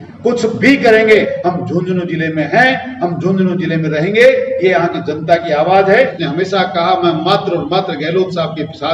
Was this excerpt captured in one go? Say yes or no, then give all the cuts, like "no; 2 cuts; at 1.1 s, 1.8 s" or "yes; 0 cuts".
no; 2 cuts; at 1.3 s, 6.0 s